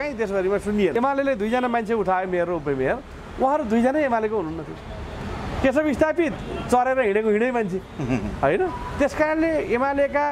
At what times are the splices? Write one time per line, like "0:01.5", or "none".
0:01.0